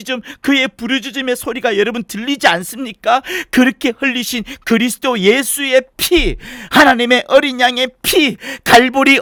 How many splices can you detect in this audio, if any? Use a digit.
0